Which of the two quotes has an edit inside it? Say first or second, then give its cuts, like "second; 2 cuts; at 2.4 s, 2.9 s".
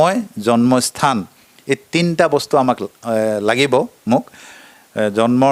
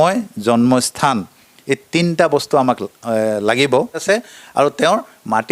second; 1 cut; at 4.0 s